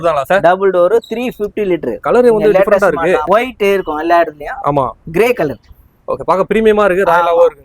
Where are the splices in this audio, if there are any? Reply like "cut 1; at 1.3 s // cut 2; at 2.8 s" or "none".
cut 1; at 2.0 s // cut 2; at 3.2 s